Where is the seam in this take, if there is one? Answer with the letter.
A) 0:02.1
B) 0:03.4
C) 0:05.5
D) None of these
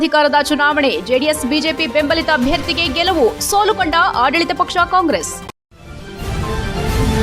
C